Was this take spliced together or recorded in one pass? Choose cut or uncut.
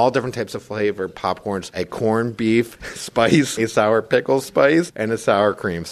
cut